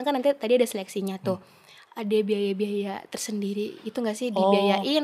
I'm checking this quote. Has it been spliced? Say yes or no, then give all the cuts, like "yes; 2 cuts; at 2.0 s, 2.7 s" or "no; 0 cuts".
no; 0 cuts